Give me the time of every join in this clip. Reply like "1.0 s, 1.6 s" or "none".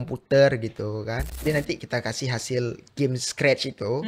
1.4 s